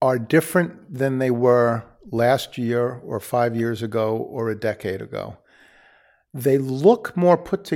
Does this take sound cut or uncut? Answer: uncut